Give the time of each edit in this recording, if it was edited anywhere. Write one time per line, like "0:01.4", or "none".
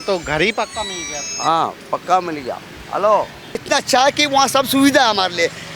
0:03.6